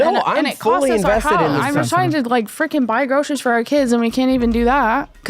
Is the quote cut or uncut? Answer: cut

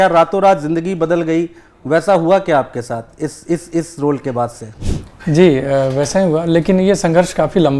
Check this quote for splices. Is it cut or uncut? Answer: uncut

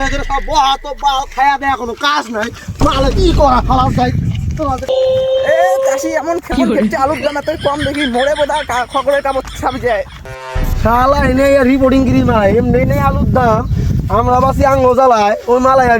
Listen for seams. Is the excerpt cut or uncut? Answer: cut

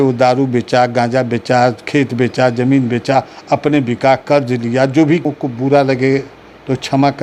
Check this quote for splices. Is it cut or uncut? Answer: cut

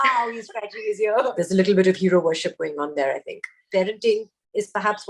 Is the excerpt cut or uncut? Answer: cut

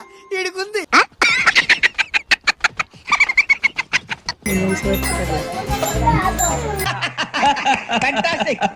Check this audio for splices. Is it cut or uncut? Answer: cut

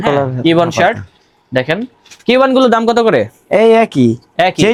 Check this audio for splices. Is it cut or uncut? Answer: uncut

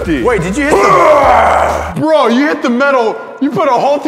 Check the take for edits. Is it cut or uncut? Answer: cut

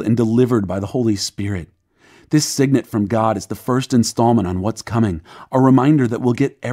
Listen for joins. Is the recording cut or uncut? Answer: cut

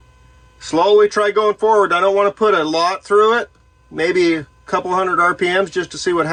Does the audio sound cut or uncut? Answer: uncut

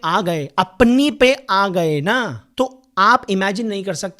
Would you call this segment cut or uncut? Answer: uncut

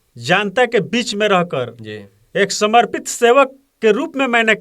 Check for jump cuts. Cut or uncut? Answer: uncut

